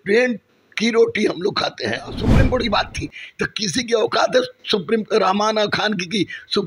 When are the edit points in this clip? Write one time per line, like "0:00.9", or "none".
0:02.3